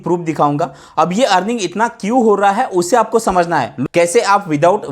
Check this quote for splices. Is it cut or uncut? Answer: cut